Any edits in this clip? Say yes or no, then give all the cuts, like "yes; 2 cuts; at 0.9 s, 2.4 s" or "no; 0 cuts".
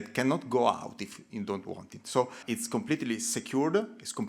yes; 1 cut; at 2.4 s